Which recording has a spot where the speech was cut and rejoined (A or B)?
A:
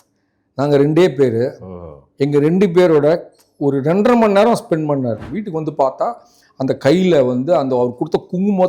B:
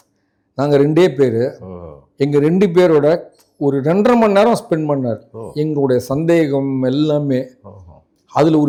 A